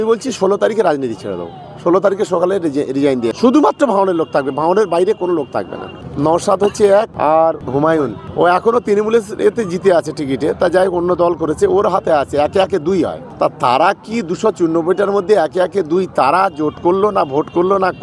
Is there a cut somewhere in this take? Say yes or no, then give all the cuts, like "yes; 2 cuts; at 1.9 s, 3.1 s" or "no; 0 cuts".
yes; 3 cuts; at 3.3 s, 6.0 s, 7.6 s